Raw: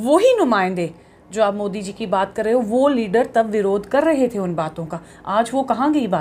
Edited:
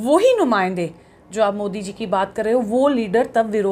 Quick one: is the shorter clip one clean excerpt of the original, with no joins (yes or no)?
yes